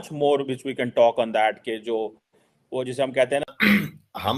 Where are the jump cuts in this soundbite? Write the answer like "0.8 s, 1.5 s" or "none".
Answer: 3.4 s